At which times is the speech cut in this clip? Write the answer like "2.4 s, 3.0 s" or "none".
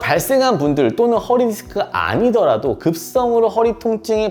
none